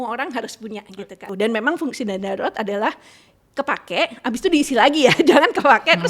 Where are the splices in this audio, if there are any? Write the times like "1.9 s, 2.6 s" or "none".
1.2 s

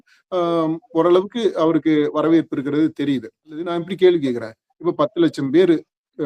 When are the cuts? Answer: 3.7 s

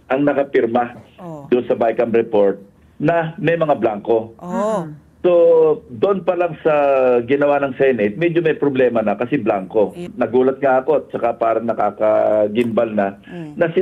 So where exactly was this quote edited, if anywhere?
10.0 s

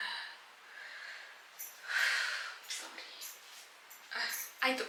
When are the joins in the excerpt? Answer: none

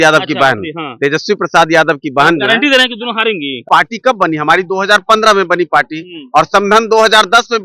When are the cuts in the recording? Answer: 3.6 s

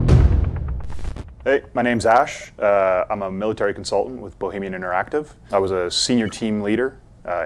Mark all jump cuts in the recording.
1.3 s

